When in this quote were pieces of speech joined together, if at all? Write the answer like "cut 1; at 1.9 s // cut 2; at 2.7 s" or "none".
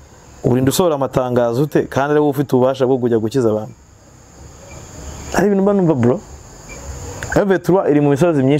none